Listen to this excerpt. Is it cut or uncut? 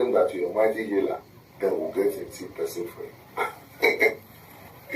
cut